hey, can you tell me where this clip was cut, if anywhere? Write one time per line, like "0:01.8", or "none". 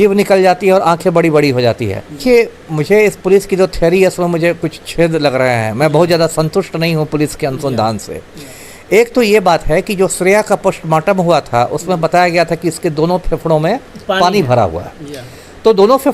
0:02.2